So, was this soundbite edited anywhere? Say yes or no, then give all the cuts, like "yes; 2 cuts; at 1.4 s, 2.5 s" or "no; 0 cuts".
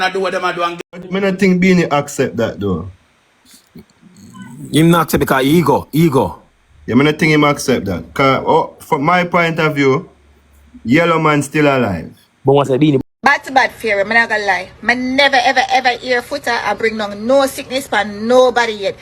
yes; 2 cuts; at 0.8 s, 13.0 s